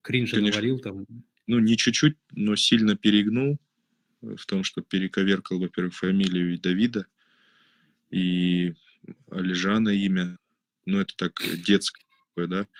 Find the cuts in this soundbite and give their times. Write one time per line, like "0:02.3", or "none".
none

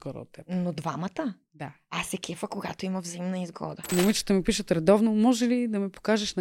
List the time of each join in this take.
0:03.9

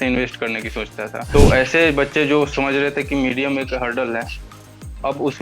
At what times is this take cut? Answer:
0:01.1

